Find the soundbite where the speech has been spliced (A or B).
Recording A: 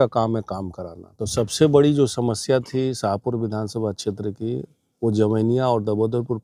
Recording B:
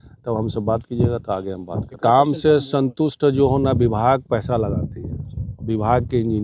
B